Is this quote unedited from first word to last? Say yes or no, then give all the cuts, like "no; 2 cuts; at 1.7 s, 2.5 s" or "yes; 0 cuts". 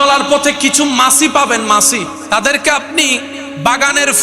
no; 1 cut; at 2.4 s